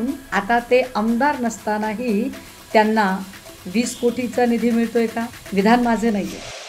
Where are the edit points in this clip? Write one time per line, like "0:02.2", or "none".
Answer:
0:05.4